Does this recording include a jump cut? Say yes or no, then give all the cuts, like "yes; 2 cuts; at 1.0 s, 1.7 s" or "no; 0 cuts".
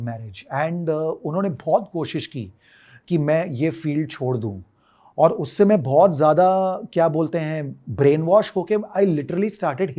no; 0 cuts